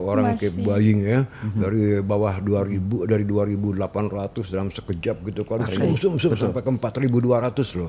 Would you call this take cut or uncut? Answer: uncut